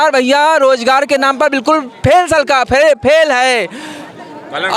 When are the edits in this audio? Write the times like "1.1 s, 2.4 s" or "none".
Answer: none